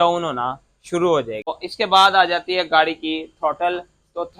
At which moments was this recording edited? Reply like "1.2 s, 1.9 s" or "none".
1.5 s